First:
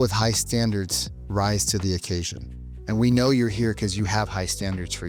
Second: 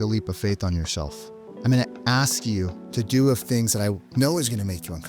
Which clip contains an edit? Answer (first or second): second